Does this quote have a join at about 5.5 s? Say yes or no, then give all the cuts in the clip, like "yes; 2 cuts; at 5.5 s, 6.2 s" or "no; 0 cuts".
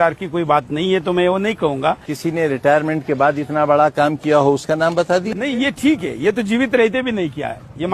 no; 1 cut; at 2.1 s